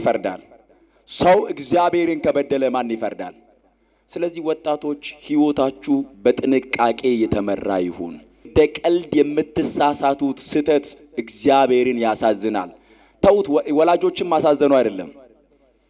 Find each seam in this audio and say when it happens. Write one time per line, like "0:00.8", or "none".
0:08.4

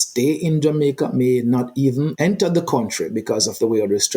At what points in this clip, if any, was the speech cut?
0:02.1

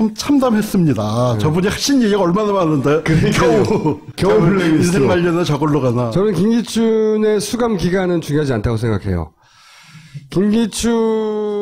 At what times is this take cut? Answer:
0:09.4

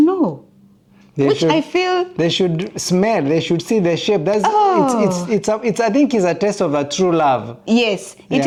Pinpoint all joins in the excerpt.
none

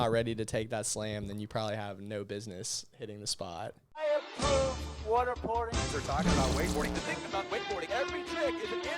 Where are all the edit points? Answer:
0:03.8

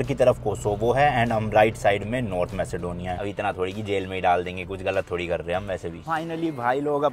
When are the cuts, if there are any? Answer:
0:03.1
0:06.0

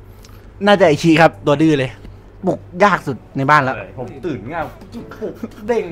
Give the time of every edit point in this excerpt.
none

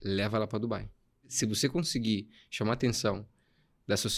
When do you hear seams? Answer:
0:01.3

